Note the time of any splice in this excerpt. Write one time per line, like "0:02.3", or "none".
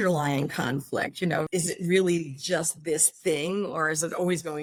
none

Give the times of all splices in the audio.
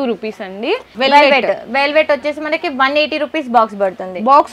none

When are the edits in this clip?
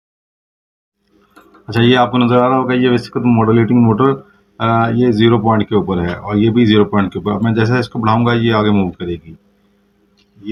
none

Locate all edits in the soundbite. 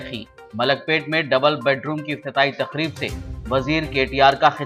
none

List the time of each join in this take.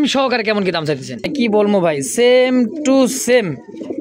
0:01.4

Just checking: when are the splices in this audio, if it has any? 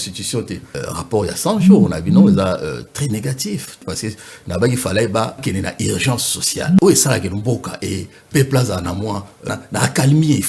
0:00.8
0:03.8
0:05.4
0:06.8
0:09.5

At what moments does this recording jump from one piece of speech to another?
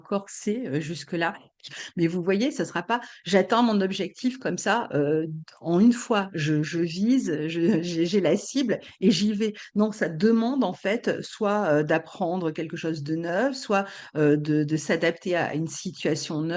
0:01.6

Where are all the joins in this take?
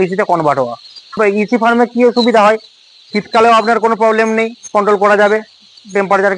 0:01.2

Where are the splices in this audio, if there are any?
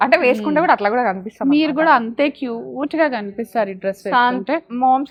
none

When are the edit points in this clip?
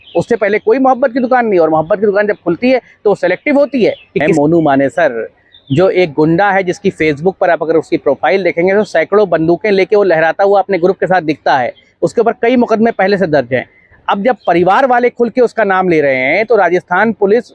0:04.3

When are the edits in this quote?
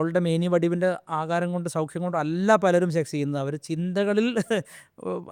none

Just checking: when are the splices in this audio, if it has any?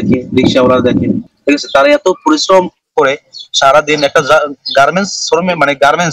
0:01.3

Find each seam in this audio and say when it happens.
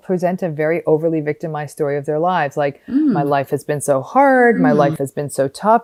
none

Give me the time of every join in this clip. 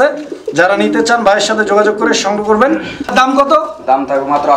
0:03.1

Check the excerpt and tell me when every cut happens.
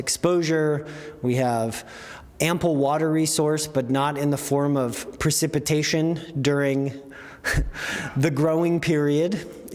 none

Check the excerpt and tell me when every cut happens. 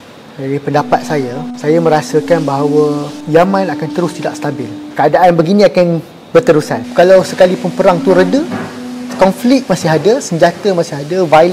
0:01.4
0:03.1
0:04.8
0:06.8

